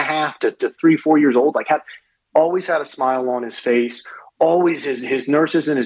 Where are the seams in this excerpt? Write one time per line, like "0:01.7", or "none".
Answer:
none